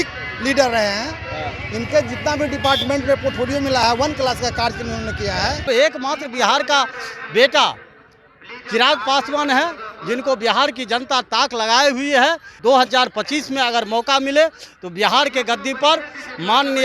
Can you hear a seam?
yes; 2 cuts; at 5.6 s, 12.5 s

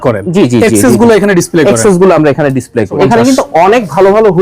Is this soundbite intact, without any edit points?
no; 1 cut; at 2.9 s

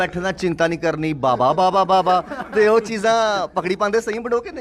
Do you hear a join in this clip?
no; 0 cuts

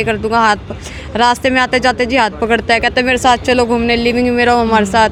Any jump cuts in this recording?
no; 0 cuts

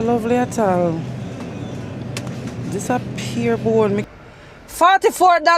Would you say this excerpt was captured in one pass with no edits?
no; 1 cut; at 4.1 s

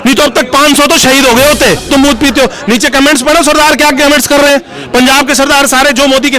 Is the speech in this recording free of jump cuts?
no; 1 cut; at 1.9 s

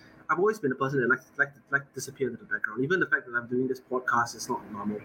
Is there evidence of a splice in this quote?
no; 0 cuts

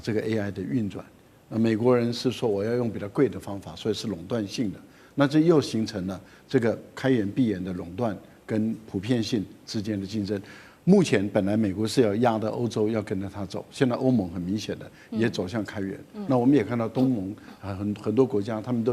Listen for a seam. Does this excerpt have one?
no; 0 cuts

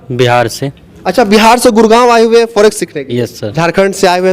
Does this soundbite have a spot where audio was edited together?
yes; 1 cut; at 3.4 s

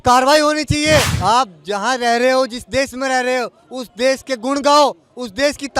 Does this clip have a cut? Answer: yes; 1 cut; at 1.1 s

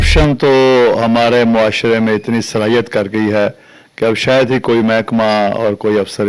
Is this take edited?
no; 0 cuts

